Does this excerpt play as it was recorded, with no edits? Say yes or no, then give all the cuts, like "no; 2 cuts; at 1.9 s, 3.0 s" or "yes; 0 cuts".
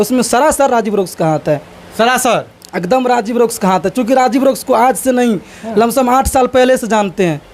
yes; 0 cuts